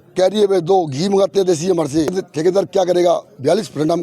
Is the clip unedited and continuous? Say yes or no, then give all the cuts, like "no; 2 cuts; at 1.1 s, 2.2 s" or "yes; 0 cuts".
no; 1 cut; at 2.1 s